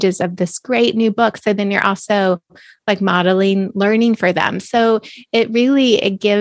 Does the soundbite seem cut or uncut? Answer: uncut